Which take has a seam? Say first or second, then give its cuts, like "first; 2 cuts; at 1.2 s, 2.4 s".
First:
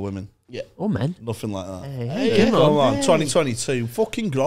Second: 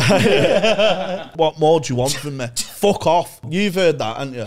second; 2 cuts; at 1.3 s, 3.4 s